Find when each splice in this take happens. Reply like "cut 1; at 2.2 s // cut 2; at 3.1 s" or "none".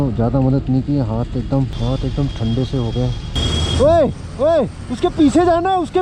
cut 1; at 1.7 s // cut 2; at 3.3 s